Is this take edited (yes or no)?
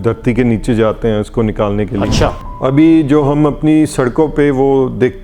yes